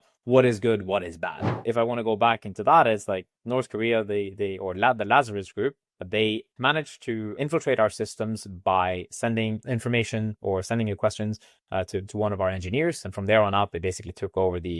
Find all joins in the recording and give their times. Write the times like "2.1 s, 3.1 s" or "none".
1.5 s, 6.5 s, 7.4 s, 9.6 s